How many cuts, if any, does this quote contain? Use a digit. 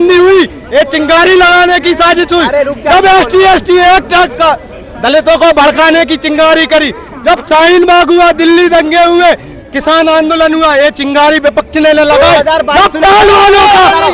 0